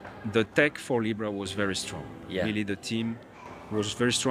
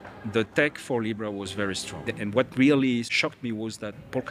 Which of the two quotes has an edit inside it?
second; 2 cuts; at 2.1 s, 3.1 s

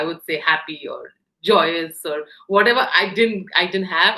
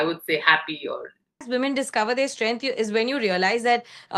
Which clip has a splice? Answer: second; 1 cut; at 1.4 s

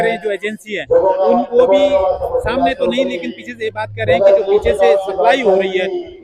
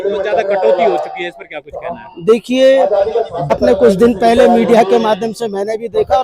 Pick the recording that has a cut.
second; 1 cut; at 3.5 s

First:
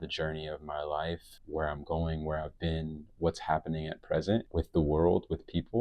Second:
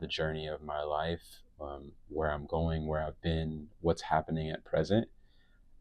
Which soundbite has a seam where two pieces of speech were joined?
first; 2 cuts; at 1.3 s, 4.5 s

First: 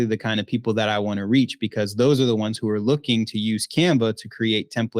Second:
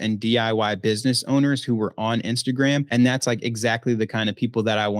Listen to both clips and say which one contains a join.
second; 1 cut; at 2.9 s

